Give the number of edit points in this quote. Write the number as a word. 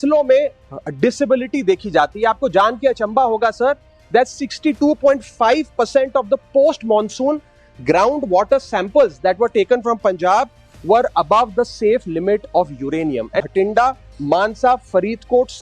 one